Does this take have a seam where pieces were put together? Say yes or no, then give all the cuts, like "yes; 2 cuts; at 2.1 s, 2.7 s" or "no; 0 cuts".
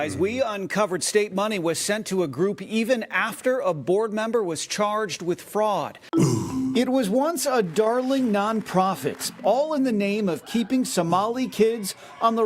yes; 2 cuts; at 6.0 s, 9.3 s